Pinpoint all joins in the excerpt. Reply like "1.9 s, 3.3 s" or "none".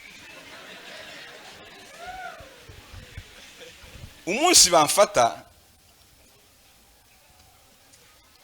4.2 s